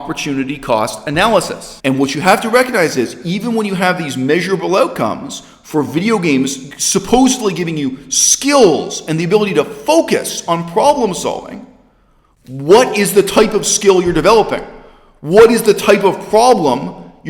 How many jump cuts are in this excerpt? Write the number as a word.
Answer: one